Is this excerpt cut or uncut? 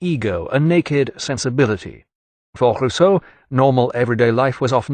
uncut